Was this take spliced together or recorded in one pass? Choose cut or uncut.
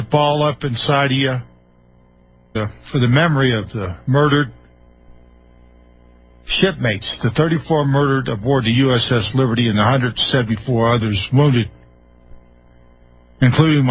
uncut